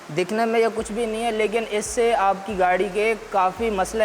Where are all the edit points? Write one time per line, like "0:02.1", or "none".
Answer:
none